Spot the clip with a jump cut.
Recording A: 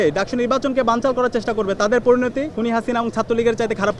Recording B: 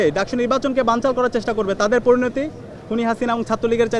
A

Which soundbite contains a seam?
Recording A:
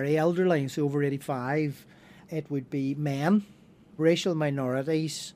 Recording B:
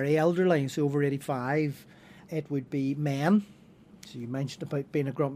A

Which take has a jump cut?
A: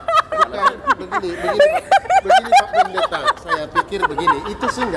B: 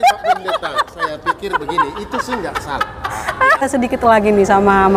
B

